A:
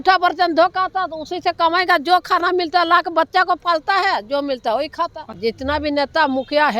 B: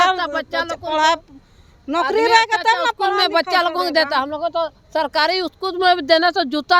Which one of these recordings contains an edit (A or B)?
A